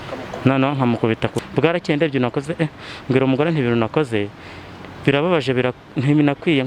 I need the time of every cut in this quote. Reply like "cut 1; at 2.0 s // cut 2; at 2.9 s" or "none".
cut 1; at 1.4 s